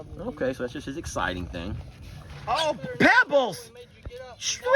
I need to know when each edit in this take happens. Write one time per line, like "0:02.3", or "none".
0:02.5